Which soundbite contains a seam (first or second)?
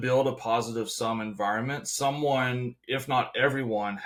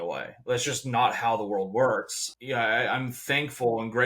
second